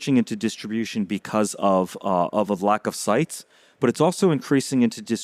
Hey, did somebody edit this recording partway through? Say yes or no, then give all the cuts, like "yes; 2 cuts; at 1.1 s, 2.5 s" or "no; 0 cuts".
no; 0 cuts